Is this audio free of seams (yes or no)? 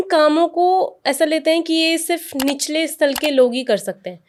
yes